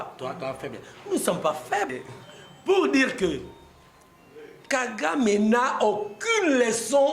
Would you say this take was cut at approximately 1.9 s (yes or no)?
yes